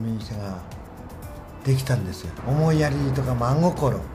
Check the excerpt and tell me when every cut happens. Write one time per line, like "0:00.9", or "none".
0:02.3